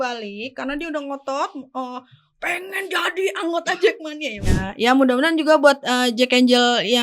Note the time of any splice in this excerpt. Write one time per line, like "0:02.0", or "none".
0:04.5